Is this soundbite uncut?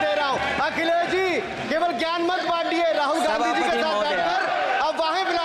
yes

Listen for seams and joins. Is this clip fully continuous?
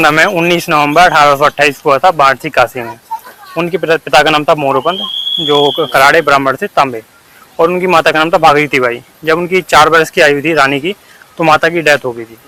yes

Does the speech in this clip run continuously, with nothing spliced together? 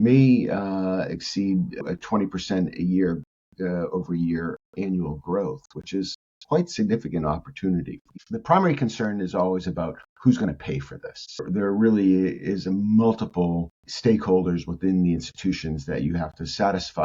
no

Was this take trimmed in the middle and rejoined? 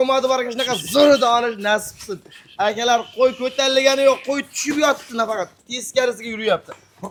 no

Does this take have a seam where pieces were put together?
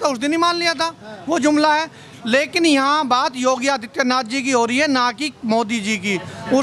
no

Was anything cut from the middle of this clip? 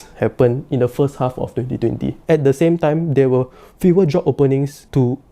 yes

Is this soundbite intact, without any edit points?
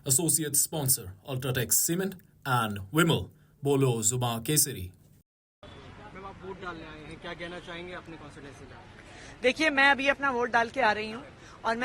no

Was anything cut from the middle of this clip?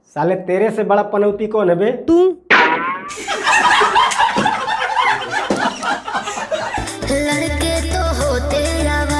yes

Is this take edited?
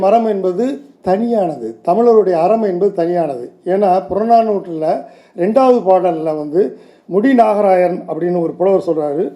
no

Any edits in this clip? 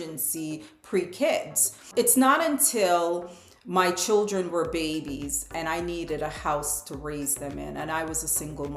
no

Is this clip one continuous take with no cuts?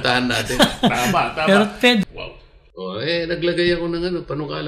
no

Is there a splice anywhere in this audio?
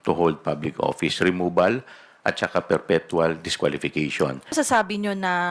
yes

